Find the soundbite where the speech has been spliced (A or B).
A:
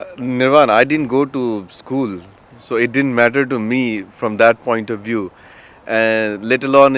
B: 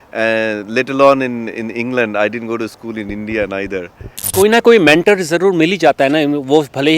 B